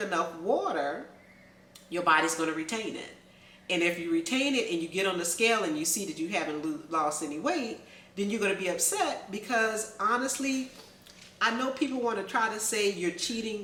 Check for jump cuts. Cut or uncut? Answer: uncut